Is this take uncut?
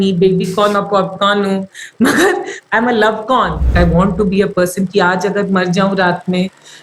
no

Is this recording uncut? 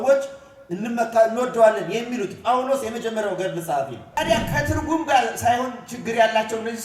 no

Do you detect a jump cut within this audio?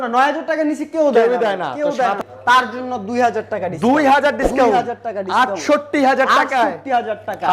yes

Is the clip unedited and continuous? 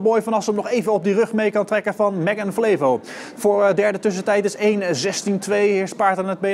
yes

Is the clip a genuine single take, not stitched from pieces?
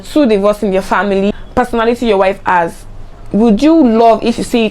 no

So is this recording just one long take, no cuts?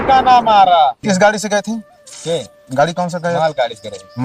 no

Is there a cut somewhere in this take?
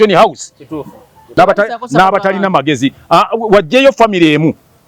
yes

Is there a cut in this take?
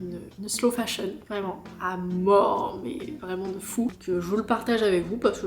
yes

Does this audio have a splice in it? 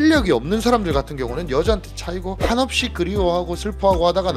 no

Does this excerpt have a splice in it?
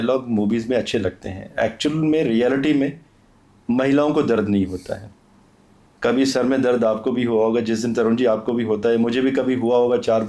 no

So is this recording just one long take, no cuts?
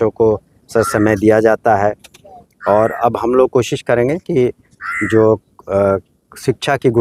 yes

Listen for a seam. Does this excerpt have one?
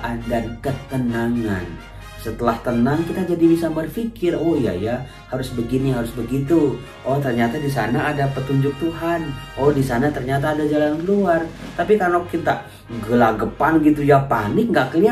no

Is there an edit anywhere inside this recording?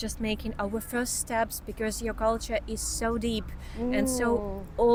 no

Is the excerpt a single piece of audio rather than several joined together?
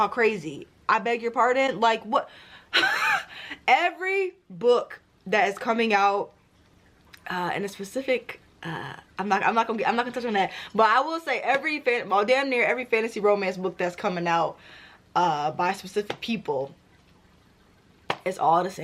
yes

